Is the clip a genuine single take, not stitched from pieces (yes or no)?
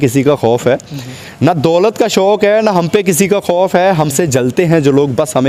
yes